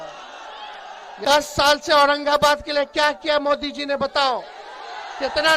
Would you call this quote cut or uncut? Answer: cut